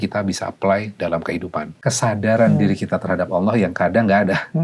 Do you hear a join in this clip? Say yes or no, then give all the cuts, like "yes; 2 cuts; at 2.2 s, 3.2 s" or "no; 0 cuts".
yes; 1 cut; at 1.6 s